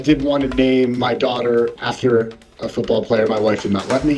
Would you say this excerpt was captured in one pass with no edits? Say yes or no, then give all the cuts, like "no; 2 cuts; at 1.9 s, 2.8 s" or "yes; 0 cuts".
no; 1 cut; at 1.0 s